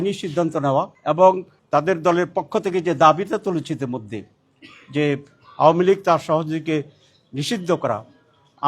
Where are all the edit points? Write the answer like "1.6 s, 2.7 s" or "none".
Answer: 0.9 s, 1.5 s